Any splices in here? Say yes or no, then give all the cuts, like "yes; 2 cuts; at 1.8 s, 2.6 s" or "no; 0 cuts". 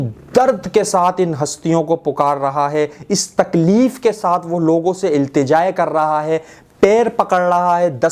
no; 0 cuts